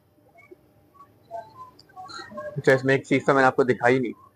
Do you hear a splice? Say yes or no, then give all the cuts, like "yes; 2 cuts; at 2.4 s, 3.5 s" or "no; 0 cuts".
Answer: no; 0 cuts